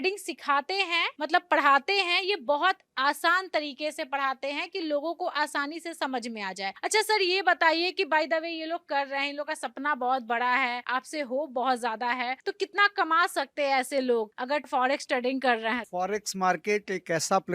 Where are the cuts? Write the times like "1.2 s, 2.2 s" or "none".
none